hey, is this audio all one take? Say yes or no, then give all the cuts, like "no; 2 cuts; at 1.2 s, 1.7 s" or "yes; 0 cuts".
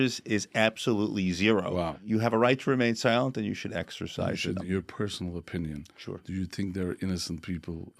no; 2 cuts; at 1.9 s, 4.6 s